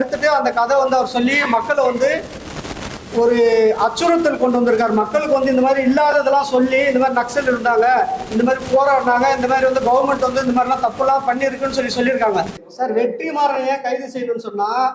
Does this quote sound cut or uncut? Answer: cut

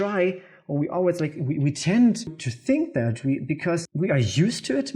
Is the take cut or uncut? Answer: cut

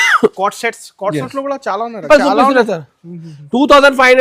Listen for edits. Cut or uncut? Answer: cut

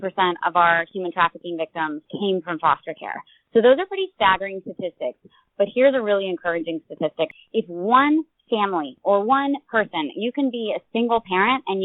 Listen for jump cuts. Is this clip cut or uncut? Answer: cut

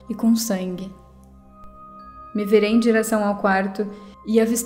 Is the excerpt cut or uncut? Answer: cut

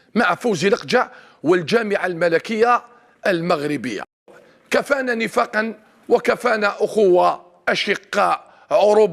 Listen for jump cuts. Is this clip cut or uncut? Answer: cut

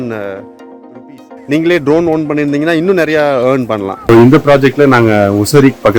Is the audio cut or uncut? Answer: cut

